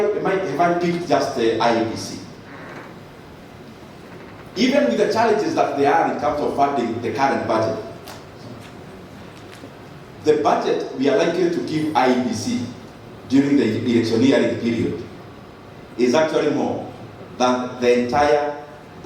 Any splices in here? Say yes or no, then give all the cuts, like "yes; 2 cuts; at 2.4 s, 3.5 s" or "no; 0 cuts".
no; 0 cuts